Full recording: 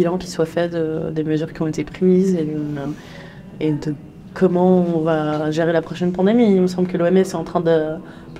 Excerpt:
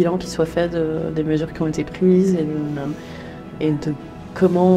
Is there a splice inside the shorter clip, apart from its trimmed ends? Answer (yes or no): no